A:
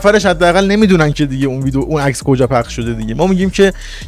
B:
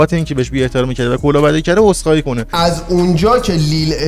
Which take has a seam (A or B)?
B